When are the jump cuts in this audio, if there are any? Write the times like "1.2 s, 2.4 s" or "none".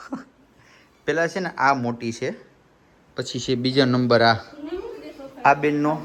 none